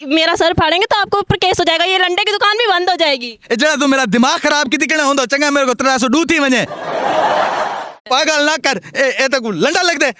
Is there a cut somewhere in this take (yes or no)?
yes